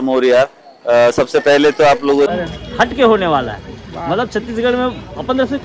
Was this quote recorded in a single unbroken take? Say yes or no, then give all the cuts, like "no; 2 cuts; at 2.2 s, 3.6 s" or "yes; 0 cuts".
no; 1 cut; at 2.3 s